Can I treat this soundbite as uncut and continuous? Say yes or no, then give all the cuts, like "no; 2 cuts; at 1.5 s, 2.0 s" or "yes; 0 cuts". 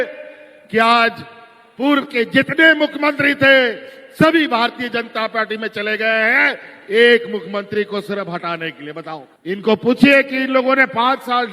no; 1 cut; at 9.2 s